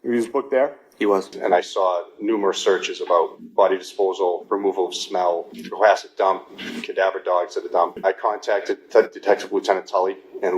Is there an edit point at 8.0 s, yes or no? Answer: yes